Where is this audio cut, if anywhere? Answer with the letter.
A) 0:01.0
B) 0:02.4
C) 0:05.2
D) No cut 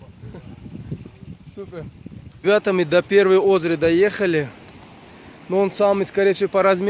B